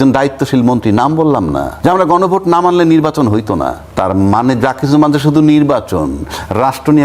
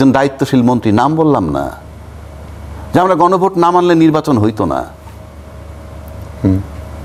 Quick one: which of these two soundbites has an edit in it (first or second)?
first